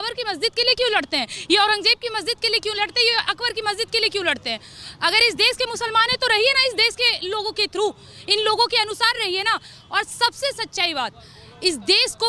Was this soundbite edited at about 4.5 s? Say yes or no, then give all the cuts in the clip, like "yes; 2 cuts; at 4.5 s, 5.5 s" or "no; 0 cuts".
no; 0 cuts